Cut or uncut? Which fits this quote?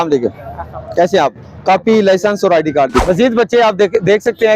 cut